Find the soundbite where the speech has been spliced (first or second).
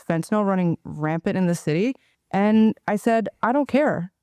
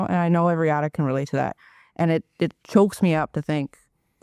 first